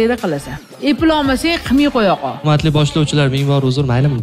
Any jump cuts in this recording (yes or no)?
yes